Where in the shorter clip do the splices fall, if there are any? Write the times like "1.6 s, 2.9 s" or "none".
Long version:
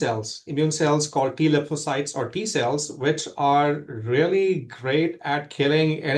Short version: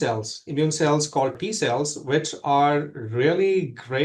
1.3 s